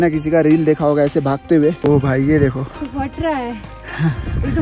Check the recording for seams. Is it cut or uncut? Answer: cut